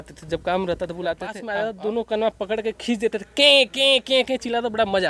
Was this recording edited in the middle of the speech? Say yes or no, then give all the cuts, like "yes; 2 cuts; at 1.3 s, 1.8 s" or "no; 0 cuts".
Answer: yes; 1 cut; at 1.4 s